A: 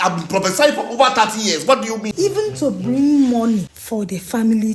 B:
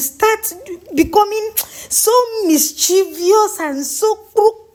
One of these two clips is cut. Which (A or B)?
A